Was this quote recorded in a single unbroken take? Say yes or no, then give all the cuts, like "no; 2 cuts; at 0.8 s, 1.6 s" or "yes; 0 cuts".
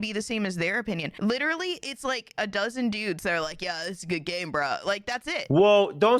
no; 2 cuts; at 1.1 s, 2.3 s